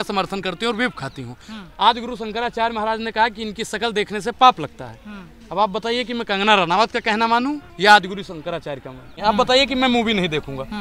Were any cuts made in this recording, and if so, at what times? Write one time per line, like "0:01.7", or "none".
0:07.7
0:09.1

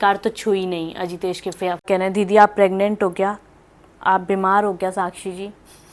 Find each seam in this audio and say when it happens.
0:01.8

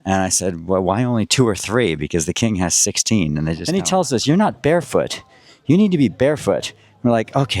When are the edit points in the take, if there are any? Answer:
0:03.6

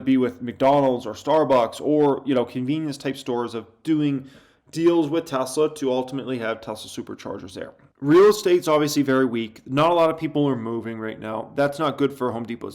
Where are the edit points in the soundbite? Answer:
0:07.8

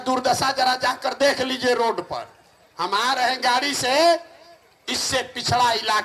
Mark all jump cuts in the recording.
none

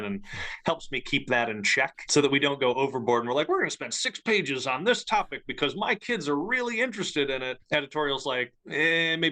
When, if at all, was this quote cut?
0:02.0
0:07.6

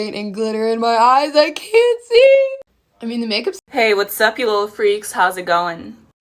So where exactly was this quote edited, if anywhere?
0:03.6

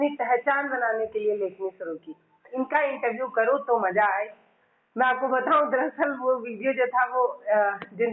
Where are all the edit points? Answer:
0:02.4

